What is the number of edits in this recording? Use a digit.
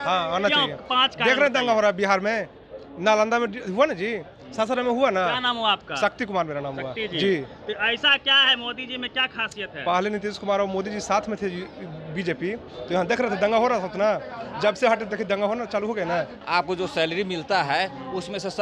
1